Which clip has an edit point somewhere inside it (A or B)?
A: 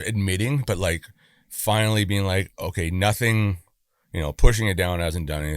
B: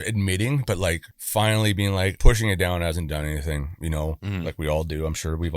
B